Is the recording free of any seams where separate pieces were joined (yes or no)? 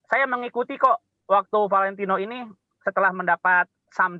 yes